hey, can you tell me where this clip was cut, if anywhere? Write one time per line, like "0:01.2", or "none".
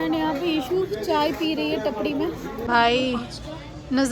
0:02.7